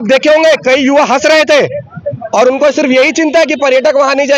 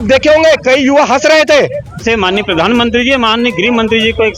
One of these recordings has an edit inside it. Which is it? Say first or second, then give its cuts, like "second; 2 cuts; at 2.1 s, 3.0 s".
second; 1 cut; at 2.0 s